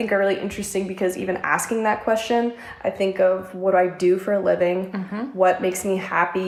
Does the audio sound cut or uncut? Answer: uncut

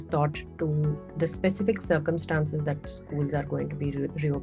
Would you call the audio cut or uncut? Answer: uncut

